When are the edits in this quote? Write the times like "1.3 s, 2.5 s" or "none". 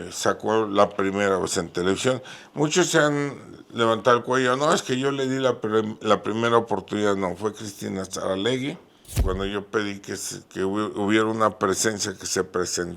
9.2 s